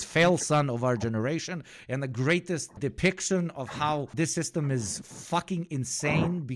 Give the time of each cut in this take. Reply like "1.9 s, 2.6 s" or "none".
4.1 s